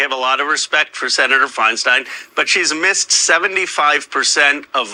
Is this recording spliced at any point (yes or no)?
no